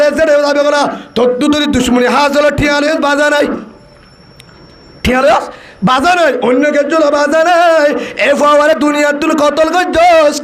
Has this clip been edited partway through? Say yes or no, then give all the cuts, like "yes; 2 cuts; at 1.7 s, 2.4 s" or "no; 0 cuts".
no; 0 cuts